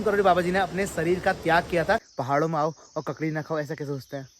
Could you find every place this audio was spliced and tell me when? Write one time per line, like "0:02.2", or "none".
0:02.1